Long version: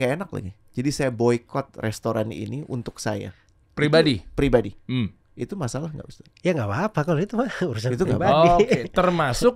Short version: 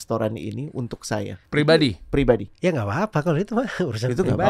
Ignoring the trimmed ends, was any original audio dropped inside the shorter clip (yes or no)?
yes